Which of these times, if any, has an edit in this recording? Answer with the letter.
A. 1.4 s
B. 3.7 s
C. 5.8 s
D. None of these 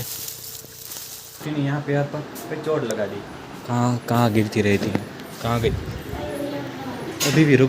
A